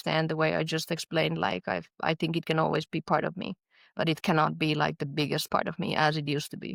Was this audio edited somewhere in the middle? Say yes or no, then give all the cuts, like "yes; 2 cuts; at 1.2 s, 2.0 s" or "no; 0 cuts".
no; 0 cuts